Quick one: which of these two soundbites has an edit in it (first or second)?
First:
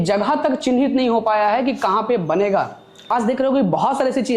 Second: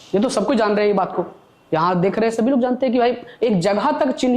first